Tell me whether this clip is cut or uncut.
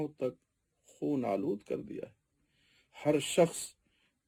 uncut